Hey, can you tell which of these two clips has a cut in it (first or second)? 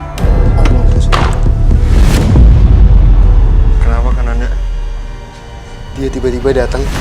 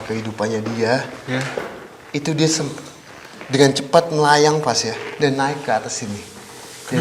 first